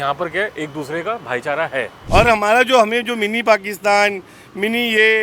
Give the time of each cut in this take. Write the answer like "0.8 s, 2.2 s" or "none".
2.0 s